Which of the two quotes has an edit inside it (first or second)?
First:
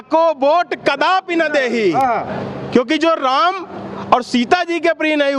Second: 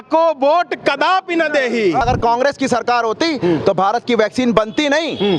second